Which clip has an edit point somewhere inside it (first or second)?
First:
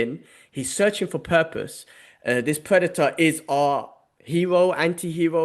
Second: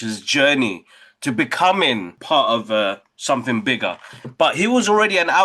second